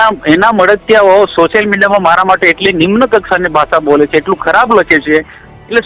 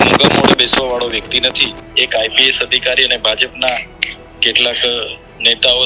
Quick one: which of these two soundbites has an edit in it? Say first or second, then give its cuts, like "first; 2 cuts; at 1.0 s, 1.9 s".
second; 1 cut; at 1.8 s